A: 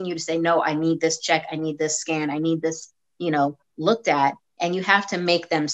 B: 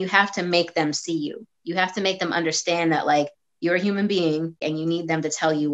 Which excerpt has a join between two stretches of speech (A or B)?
B